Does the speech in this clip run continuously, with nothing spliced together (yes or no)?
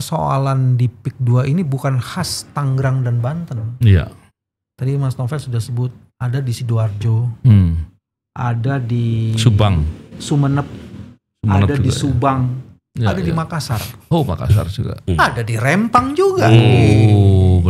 yes